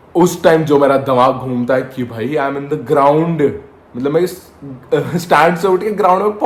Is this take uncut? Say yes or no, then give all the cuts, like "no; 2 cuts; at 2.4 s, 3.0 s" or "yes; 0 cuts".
yes; 0 cuts